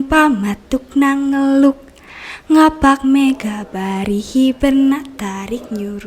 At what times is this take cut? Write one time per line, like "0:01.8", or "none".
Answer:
none